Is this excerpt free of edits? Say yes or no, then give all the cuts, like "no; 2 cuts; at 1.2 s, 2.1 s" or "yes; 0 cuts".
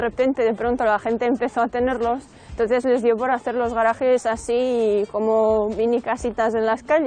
yes; 0 cuts